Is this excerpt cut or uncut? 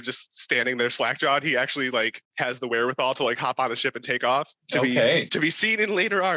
cut